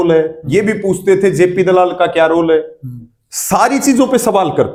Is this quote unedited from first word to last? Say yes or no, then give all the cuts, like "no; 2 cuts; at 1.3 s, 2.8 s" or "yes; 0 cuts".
yes; 0 cuts